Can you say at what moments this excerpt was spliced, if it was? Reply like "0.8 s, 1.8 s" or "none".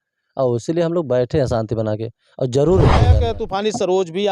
3.2 s